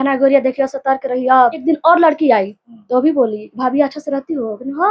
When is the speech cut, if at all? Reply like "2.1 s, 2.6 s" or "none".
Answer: 1.6 s